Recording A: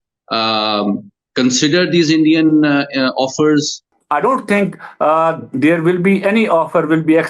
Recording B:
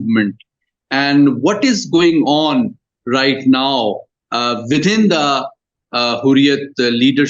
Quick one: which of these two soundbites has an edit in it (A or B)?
A